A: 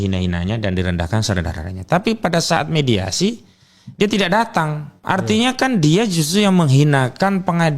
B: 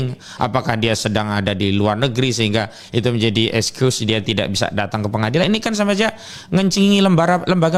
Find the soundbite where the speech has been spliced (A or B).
A